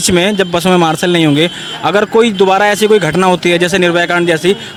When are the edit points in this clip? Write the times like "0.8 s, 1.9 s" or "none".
none